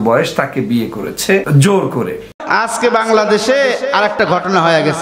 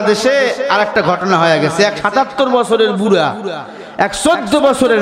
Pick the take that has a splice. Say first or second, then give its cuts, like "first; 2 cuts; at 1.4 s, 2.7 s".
first; 2 cuts; at 1.5 s, 2.3 s